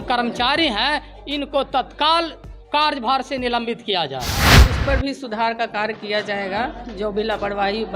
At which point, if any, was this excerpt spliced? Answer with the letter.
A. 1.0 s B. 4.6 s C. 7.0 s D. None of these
B